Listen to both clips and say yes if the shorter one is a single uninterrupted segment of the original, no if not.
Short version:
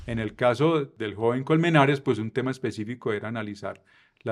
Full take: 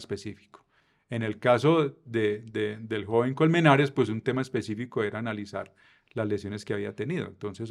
no